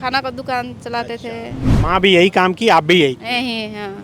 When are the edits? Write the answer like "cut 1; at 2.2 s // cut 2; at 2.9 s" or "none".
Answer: cut 1; at 1.6 s